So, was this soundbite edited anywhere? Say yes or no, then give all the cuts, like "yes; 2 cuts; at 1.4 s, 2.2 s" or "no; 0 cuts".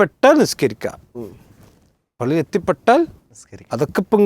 no; 0 cuts